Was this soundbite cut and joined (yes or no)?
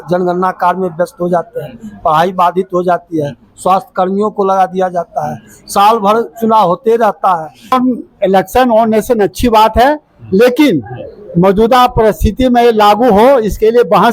yes